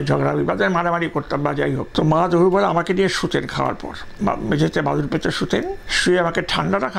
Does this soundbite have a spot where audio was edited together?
yes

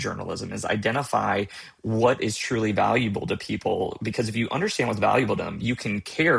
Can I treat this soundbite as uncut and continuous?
yes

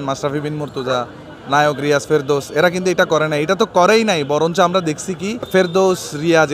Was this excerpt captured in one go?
no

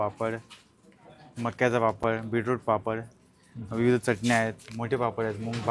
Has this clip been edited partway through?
no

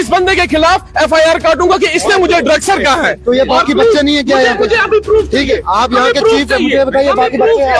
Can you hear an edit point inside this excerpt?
no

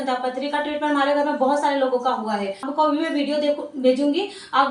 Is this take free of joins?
no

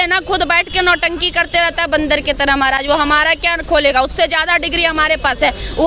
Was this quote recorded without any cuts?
yes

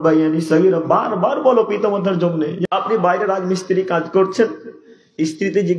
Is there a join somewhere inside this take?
yes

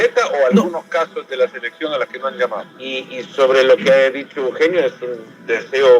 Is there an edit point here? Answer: yes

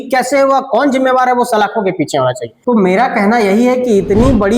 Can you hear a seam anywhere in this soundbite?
yes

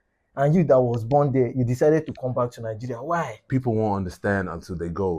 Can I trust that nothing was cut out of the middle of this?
no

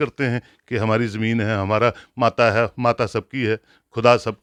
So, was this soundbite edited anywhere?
no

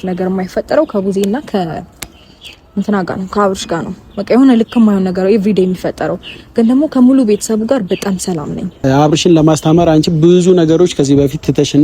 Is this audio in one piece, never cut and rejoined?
no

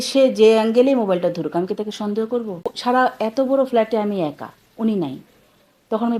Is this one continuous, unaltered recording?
no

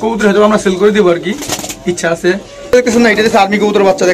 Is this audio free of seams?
no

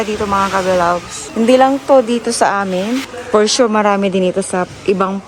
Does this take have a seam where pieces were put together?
no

